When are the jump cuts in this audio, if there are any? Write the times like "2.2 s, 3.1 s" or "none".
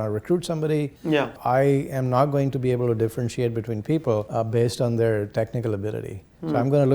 1.4 s, 4.3 s